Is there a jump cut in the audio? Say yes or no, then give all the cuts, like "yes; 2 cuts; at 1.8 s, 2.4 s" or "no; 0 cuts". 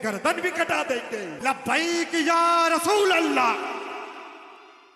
yes; 1 cut; at 1.3 s